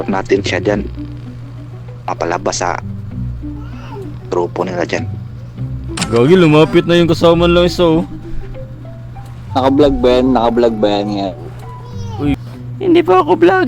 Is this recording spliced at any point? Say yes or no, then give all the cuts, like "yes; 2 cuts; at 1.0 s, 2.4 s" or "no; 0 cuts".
yes; 2 cuts; at 5.9 s, 12.4 s